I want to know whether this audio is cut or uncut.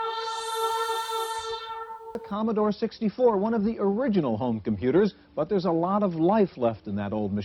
cut